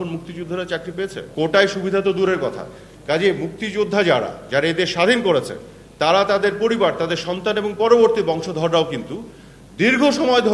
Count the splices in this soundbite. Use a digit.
0